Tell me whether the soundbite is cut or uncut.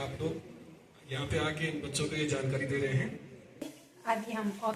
cut